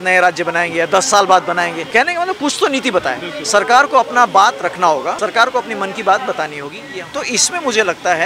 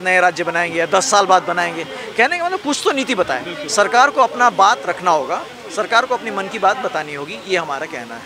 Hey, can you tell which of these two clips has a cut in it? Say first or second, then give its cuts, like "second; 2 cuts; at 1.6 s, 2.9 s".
first; 3 cuts; at 1.8 s, 5.2 s, 6.7 s